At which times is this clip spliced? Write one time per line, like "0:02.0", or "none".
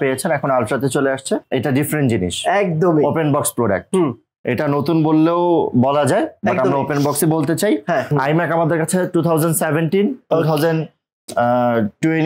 0:01.5
0:08.1